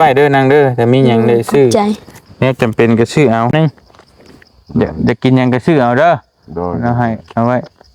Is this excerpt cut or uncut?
cut